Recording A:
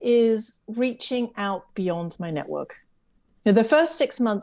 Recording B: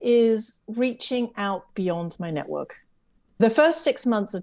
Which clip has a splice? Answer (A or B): B